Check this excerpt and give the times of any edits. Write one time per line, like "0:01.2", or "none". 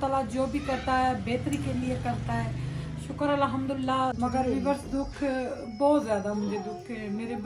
0:04.2